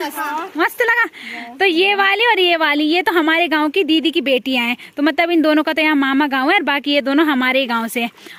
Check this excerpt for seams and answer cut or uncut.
uncut